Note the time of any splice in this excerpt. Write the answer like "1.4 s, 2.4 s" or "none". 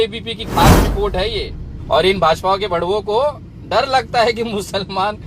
1.7 s